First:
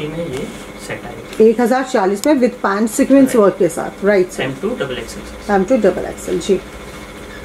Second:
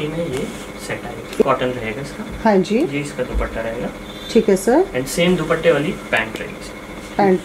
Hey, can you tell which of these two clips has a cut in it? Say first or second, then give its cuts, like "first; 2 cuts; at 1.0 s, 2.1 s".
second; 1 cut; at 1.4 s